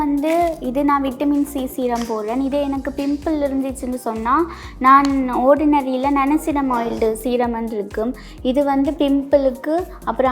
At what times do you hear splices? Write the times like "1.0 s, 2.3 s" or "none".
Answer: none